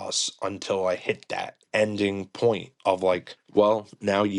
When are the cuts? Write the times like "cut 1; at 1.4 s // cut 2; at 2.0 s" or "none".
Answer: none